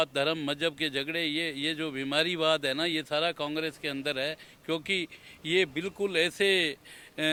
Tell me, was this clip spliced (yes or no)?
no